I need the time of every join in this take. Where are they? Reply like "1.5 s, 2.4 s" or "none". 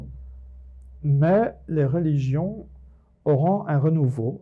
1.0 s